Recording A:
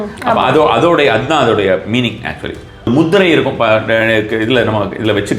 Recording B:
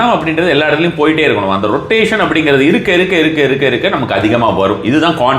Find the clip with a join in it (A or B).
A